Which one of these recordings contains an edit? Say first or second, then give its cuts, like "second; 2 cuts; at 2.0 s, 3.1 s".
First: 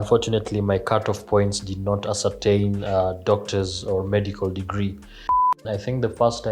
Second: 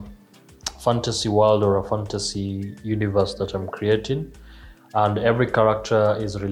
first; 1 cut; at 5.5 s